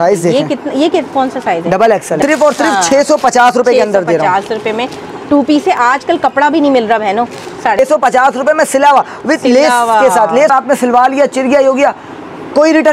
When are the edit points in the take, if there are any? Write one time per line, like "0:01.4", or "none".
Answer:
0:02.2
0:07.8
0:10.5